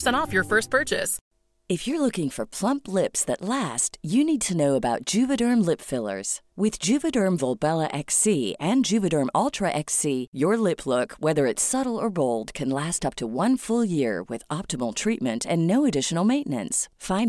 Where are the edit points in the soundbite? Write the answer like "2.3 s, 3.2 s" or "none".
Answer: 1.2 s